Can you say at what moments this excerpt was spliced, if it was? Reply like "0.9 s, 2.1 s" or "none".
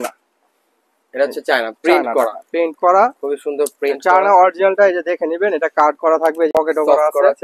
6.5 s